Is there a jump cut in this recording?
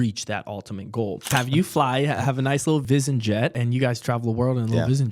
yes; 3 cuts; at 1.3 s, 2.8 s, 3.6 s

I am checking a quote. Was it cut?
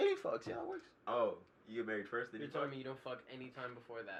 no; 0 cuts

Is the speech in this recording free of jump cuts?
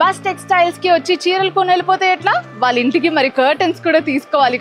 yes; 0 cuts

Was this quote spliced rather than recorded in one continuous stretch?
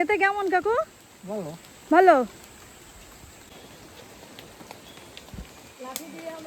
yes; 1 cut; at 3.5 s

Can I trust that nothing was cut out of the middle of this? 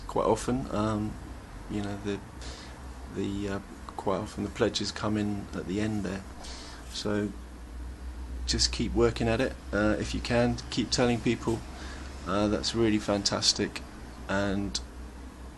yes; 0 cuts

